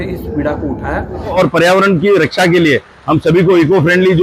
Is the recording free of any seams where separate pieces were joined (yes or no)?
no